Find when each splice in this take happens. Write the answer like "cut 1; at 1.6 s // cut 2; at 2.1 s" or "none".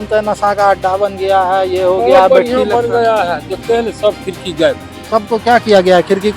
cut 1; at 4.9 s